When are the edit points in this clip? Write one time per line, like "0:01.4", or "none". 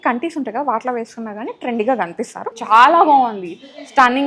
0:02.5